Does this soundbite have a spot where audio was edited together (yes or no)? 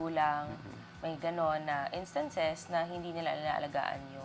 no